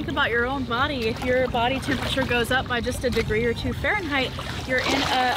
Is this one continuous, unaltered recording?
yes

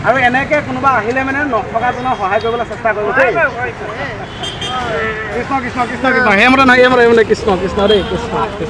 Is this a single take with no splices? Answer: yes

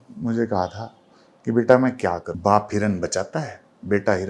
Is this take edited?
yes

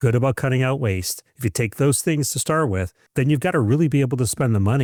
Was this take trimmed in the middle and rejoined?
no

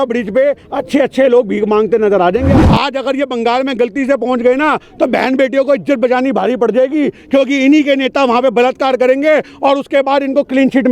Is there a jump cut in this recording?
yes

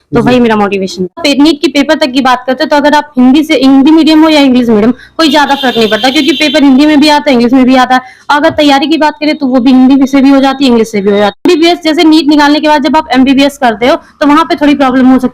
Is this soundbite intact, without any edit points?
no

